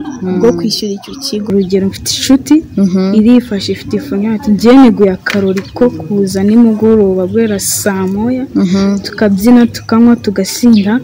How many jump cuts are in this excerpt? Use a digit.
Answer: 1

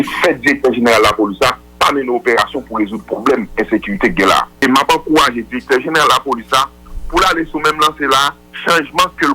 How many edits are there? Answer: 1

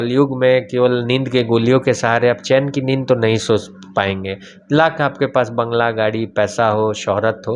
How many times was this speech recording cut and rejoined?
0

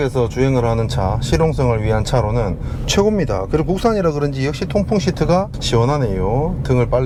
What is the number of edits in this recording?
0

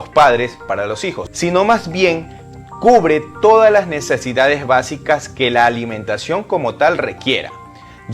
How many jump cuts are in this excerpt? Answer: 1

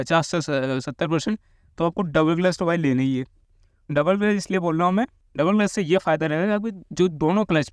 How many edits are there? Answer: 0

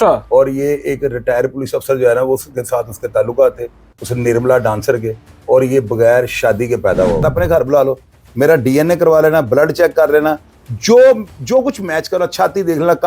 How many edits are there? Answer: 1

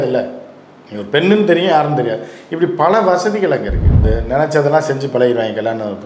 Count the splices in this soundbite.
1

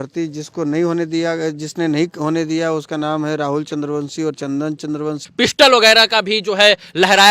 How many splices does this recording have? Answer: 1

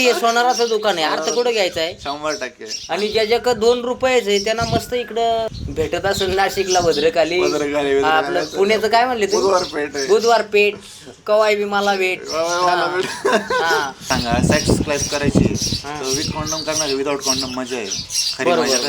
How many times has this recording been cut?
2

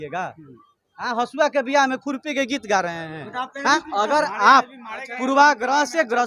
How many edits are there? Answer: 1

